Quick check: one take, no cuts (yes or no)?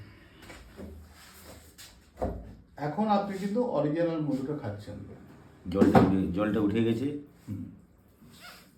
yes